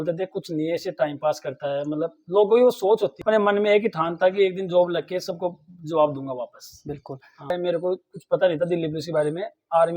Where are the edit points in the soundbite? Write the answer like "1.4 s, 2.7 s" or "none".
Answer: 3.2 s, 7.5 s